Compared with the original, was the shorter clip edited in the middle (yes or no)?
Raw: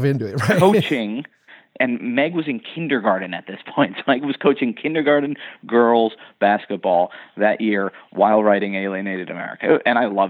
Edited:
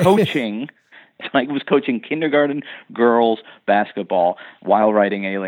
yes